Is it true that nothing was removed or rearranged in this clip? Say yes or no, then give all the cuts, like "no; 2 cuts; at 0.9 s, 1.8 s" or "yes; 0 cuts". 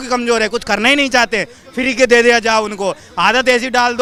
yes; 0 cuts